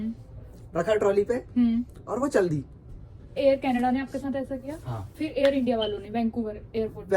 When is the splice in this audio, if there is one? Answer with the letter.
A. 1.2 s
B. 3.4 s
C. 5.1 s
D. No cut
B